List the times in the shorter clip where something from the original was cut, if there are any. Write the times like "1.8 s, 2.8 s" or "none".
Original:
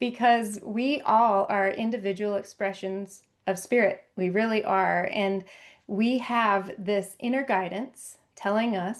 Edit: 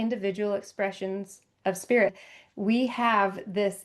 2.2 s